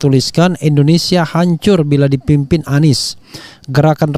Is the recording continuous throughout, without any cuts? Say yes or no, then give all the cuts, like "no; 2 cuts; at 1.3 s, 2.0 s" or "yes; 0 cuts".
yes; 0 cuts